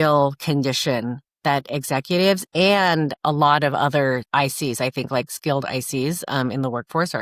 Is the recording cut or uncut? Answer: cut